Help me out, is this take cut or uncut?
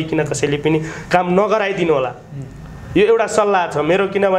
uncut